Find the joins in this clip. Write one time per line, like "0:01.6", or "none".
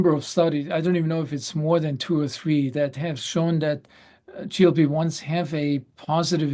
none